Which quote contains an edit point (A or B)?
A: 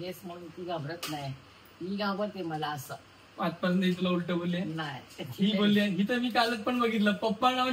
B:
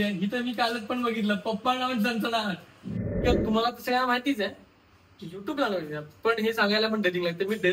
B